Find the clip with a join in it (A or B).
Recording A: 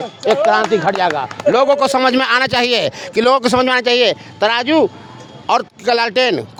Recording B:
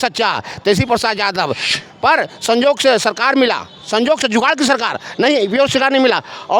B